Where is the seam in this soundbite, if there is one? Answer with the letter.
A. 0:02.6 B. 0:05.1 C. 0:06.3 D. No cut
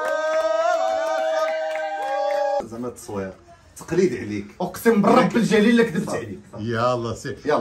A